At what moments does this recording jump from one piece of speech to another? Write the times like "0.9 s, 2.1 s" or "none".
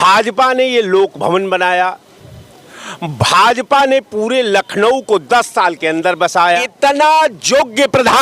6.7 s